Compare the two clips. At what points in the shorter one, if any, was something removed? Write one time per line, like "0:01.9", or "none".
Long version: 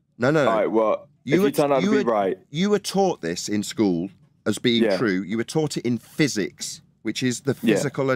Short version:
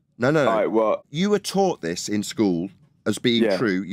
0:01.1